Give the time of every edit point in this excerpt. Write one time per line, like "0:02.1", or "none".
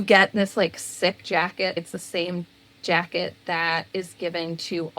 0:01.8